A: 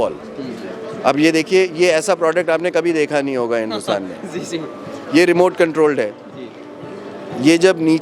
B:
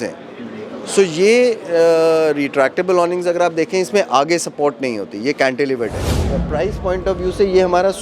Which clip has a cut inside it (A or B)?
B